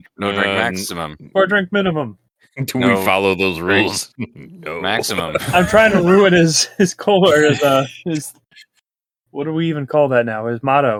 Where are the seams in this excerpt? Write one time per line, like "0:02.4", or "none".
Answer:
none